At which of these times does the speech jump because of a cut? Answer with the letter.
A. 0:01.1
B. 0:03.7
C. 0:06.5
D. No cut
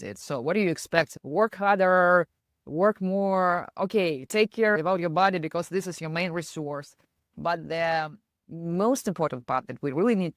A